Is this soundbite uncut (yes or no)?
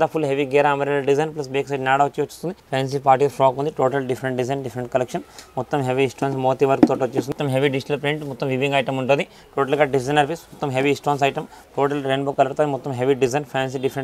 no